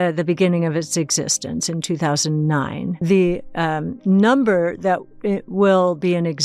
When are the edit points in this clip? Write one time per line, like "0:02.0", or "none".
0:03.0